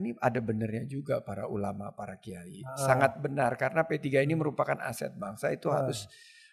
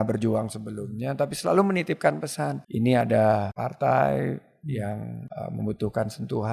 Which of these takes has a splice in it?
second; 3 cuts; at 2.6 s, 3.6 s, 5.2 s

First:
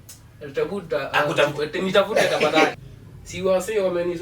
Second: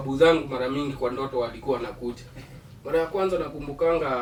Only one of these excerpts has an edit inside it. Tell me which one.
first; 1 cut; at 2.7 s

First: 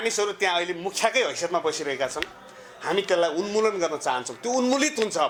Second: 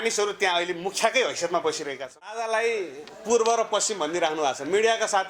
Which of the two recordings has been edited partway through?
second; 1 cut; at 2.3 s

